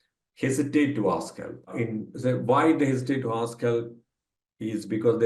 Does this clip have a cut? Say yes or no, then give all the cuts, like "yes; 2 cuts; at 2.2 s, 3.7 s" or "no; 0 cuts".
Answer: yes; 1 cut; at 1.7 s